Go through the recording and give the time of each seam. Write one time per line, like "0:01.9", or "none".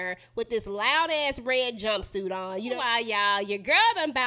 0:02.8